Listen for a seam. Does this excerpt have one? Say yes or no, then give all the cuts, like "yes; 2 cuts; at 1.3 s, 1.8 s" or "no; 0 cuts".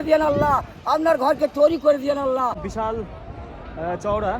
yes; 1 cut; at 2.5 s